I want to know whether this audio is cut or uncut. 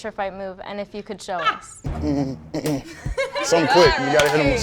cut